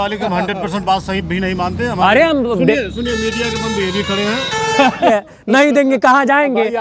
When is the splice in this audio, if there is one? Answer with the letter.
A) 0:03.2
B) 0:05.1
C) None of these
B